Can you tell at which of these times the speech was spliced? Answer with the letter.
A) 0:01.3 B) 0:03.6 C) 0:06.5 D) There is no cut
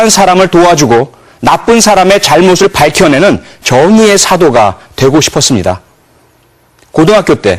C